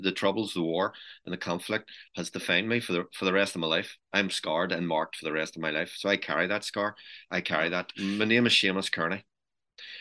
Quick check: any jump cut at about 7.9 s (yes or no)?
yes